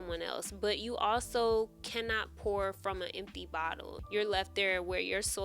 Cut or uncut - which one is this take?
cut